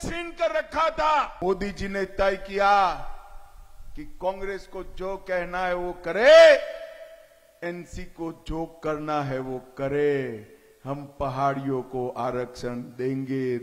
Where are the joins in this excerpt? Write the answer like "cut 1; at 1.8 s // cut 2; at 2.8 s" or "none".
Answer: cut 1; at 1.3 s